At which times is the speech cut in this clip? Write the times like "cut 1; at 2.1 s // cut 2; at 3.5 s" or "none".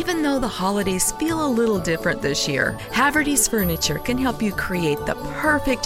none